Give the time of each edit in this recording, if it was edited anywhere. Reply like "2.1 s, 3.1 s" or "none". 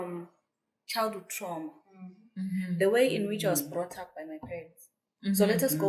none

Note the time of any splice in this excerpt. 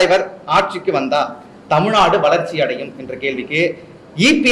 none

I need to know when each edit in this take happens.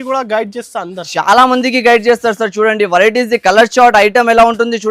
none

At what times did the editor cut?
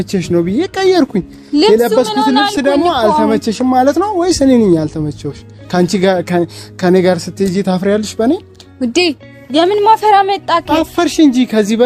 none

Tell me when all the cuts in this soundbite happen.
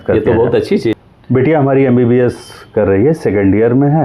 0.9 s

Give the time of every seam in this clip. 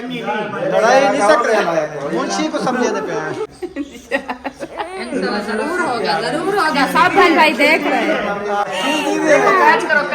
3.6 s

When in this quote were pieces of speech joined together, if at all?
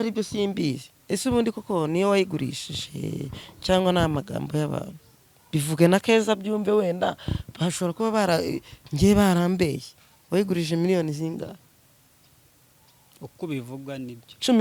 none

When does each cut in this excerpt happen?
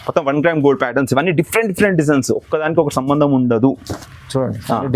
none

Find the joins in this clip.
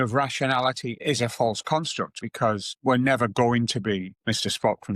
0.9 s, 2.1 s

